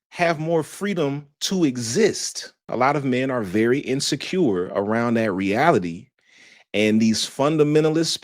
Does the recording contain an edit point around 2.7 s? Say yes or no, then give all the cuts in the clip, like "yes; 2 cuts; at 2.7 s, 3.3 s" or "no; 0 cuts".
yes; 1 cut; at 2.7 s